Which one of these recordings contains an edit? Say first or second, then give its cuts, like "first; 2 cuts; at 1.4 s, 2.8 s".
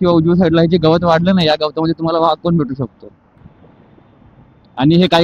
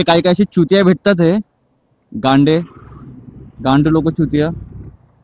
first; 1 cut; at 3.4 s